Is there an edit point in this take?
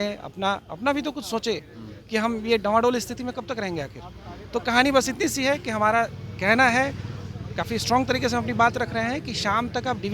no; 0 cuts

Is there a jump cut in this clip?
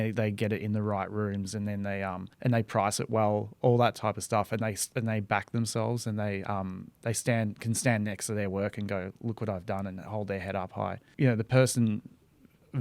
yes; 2 cuts; at 2.3 s, 11.0 s

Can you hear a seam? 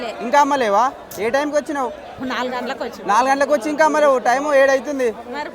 no; 0 cuts

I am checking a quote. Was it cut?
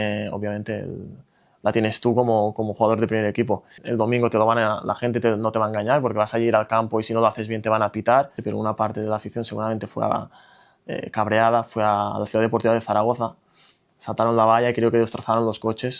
yes; 2 cuts; at 3.8 s, 8.4 s

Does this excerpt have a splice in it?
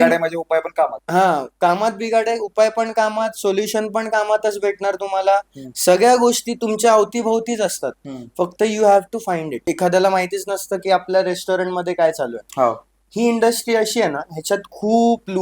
yes; 1 cut; at 9.6 s

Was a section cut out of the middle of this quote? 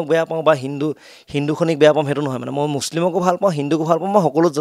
no; 0 cuts

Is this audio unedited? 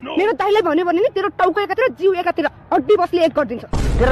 yes; 0 cuts

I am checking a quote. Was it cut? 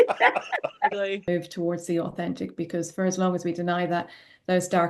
yes; 1 cut; at 1.3 s

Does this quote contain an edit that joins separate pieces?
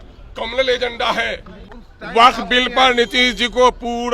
yes; 1 cut; at 1.7 s

